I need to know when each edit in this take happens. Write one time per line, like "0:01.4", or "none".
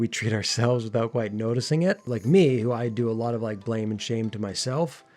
0:02.1